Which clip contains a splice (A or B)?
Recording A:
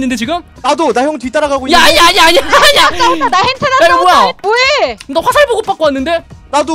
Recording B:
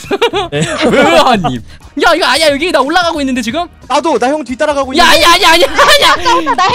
B